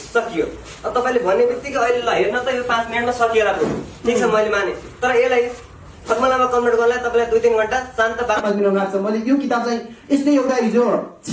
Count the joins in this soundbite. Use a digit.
1